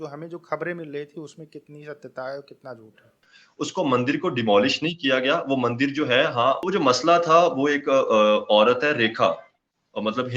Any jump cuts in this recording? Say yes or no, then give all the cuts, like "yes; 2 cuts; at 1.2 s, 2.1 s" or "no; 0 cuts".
yes; 2 cuts; at 3.2 s, 6.6 s